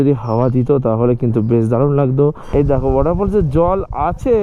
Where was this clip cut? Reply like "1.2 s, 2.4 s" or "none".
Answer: 2.4 s

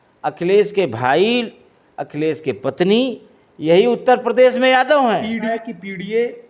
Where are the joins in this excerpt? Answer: none

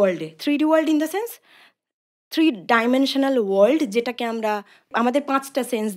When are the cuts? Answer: 4.9 s

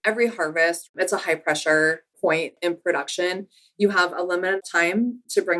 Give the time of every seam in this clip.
4.6 s

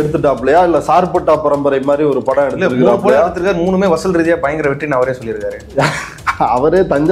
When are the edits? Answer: none

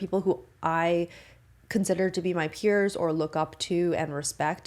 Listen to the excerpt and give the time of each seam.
none

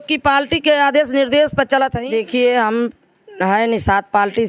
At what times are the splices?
2.0 s

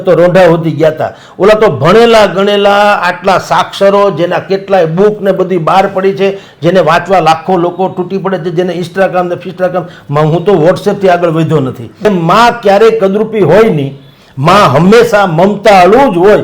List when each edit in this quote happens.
12.0 s

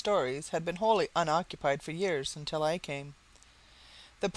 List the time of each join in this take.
2.3 s

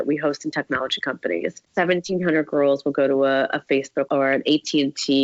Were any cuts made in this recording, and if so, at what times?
4.1 s

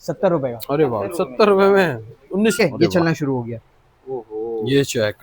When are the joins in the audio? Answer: 2.6 s

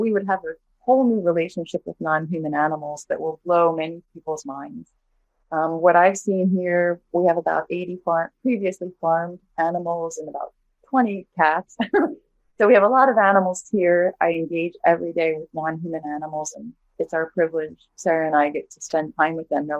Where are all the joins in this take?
none

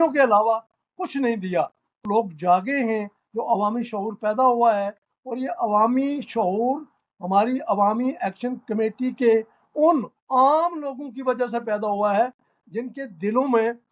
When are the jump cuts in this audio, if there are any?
2.0 s

